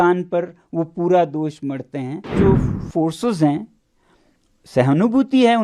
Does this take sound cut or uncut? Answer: cut